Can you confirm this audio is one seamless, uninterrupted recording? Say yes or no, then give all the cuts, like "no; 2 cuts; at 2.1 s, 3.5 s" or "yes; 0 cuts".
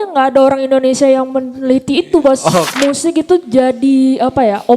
no; 1 cut; at 2.7 s